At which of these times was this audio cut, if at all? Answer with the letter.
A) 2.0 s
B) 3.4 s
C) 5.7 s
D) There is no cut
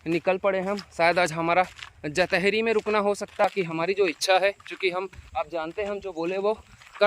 B